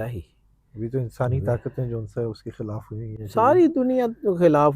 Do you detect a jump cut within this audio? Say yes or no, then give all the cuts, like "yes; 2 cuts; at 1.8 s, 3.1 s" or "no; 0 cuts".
no; 0 cuts